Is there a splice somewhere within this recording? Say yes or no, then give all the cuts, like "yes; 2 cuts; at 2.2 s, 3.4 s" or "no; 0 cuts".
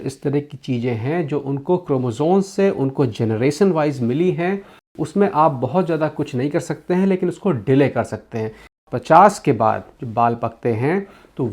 yes; 2 cuts; at 4.7 s, 8.8 s